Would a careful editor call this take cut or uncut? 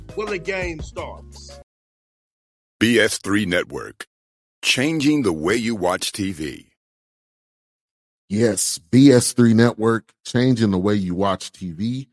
cut